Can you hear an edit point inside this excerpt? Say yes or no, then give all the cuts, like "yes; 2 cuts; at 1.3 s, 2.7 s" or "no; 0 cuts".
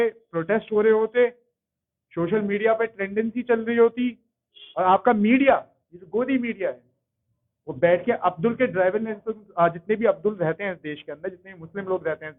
no; 0 cuts